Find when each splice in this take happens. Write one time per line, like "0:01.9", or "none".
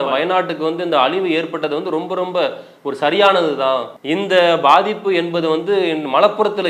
0:03.9